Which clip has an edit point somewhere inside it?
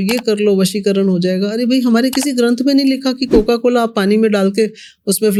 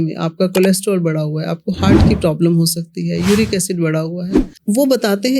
second; 1 cut; at 4.4 s

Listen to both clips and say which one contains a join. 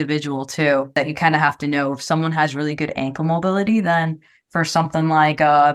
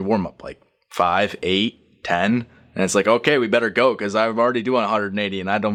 first; 1 cut; at 0.9 s

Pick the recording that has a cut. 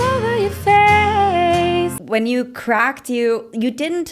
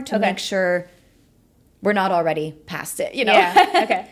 first; 1 cut; at 2.0 s

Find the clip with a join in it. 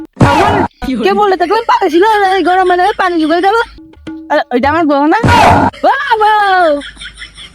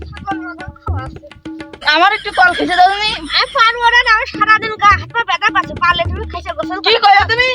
first; 1 cut; at 3.8 s

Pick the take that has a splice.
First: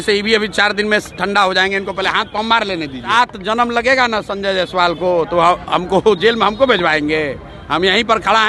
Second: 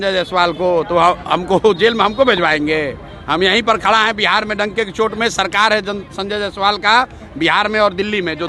first; 1 cut; at 3.1 s

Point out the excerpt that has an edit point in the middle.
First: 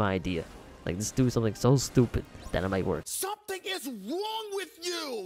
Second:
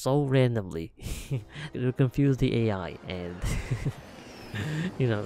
second; 1 cut; at 1.7 s

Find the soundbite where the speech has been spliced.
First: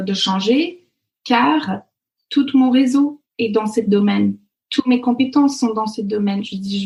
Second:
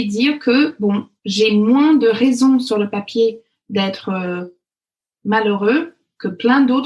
second; 1 cut; at 1.2 s

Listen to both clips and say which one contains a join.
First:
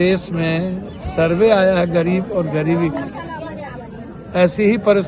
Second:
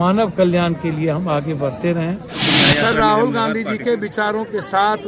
second; 1 cut; at 2.3 s

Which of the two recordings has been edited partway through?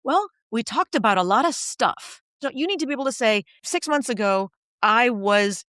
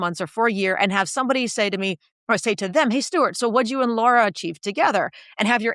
first; 2 cuts; at 2.4 s, 3.6 s

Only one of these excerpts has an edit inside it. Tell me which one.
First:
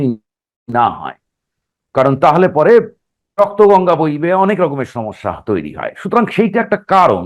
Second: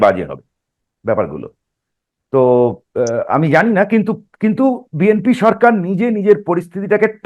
first; 1 cut; at 3.2 s

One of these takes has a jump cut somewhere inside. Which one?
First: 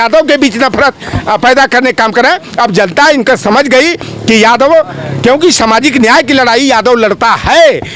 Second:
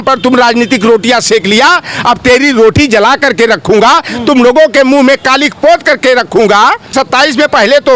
second; 1 cut; at 6.9 s

